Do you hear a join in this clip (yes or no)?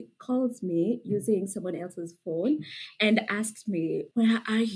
no